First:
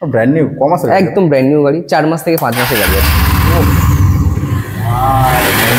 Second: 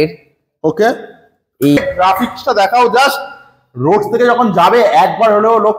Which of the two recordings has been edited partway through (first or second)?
second